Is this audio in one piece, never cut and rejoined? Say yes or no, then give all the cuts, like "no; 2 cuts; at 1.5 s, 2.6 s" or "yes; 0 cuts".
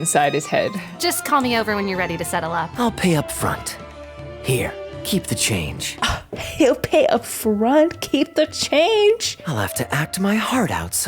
no; 3 cuts; at 0.9 s, 2.7 s, 9.3 s